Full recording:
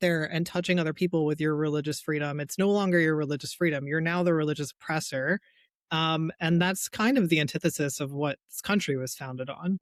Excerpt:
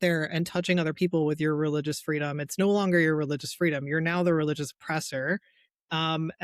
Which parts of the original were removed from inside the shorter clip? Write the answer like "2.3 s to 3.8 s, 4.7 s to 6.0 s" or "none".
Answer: none